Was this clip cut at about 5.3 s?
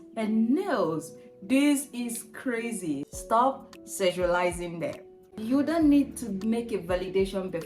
yes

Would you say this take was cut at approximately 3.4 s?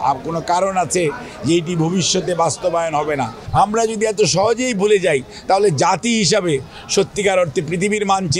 yes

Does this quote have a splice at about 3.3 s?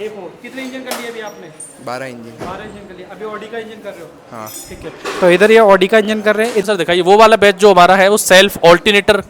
no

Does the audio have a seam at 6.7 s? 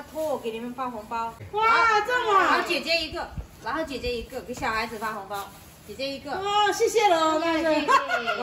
no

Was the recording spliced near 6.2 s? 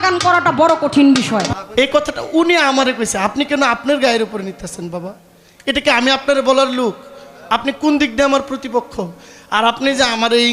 no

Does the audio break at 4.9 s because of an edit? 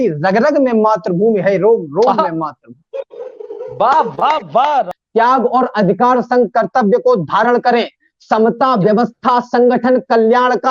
yes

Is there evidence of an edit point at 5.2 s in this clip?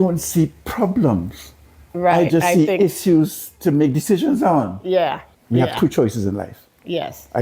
yes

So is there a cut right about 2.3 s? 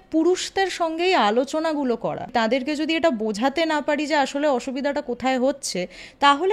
yes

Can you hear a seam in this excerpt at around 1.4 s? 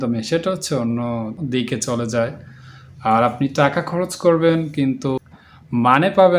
yes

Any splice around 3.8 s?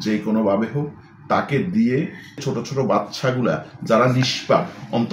no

